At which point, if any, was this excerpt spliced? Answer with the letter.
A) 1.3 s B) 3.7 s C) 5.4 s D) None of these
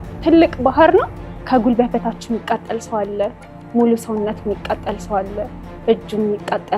A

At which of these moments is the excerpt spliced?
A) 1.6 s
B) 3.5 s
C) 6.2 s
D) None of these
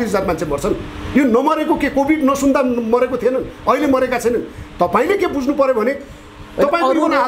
D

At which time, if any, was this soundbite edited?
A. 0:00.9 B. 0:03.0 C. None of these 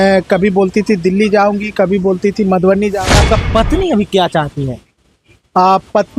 B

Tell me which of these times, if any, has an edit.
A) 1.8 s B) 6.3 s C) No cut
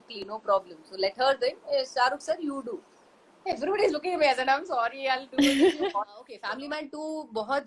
B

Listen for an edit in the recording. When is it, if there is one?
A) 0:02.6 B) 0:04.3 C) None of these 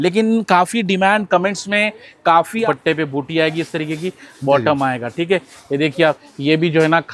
A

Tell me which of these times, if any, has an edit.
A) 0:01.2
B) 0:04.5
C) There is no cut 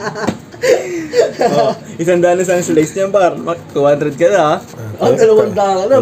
C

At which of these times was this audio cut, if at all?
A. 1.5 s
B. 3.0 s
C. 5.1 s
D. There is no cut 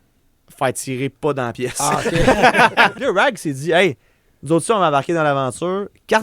B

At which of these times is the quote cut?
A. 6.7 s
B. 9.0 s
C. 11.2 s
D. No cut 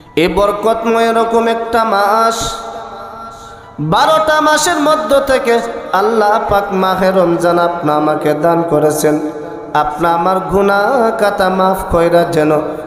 D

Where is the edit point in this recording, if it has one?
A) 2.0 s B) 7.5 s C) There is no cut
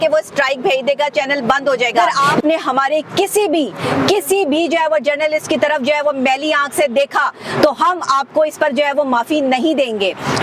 A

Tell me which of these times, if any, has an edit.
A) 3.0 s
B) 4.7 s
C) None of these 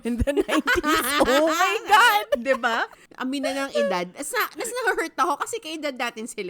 A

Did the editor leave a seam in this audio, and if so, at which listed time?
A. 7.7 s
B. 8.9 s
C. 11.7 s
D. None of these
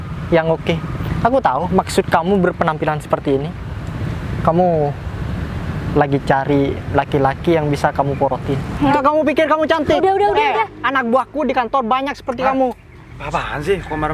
B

